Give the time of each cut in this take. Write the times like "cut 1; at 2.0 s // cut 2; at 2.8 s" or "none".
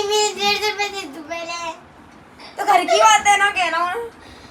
none